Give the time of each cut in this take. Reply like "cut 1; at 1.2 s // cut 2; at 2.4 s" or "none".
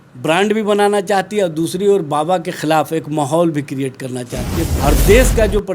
cut 1; at 4.6 s